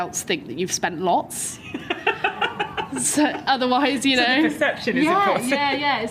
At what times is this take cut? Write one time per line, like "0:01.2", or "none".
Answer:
none